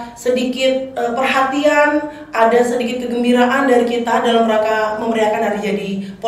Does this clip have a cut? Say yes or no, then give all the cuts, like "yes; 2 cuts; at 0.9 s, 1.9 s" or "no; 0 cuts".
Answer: no; 0 cuts